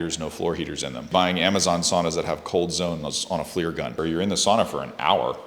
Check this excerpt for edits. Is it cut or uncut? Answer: cut